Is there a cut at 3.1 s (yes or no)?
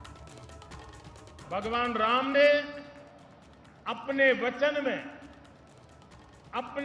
no